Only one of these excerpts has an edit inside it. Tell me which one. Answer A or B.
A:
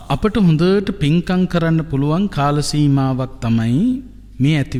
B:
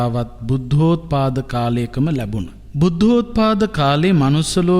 B